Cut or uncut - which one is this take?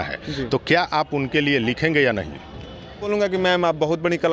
cut